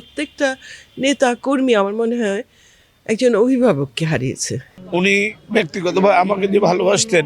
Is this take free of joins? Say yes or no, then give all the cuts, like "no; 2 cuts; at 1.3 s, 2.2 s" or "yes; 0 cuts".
no; 1 cut; at 4.8 s